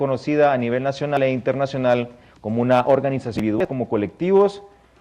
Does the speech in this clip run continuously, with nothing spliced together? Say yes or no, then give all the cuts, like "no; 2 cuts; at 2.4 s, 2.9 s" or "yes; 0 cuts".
yes; 0 cuts